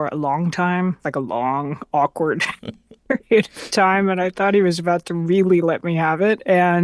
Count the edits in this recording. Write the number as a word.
zero